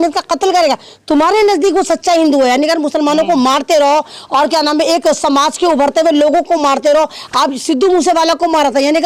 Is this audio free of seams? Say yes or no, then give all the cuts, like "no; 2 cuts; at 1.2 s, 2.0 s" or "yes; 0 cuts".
yes; 0 cuts